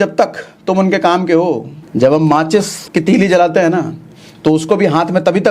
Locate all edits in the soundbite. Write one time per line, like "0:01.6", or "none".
0:01.8
0:02.8